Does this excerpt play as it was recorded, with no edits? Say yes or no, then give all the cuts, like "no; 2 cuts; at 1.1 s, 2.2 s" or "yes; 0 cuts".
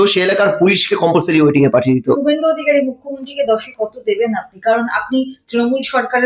yes; 0 cuts